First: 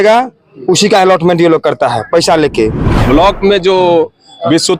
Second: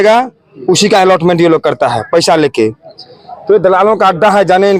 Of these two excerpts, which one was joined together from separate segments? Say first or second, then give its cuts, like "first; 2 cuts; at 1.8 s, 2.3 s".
first; 1 cut; at 2.9 s